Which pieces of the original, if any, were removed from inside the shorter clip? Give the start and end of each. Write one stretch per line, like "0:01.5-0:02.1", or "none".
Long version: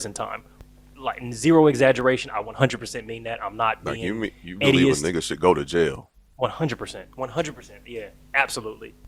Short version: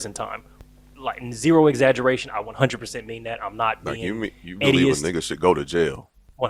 none